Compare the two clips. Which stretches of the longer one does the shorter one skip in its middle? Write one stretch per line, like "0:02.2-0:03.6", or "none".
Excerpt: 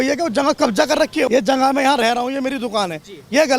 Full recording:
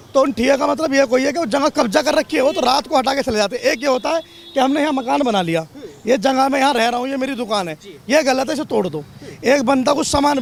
0:02.4-0:06.0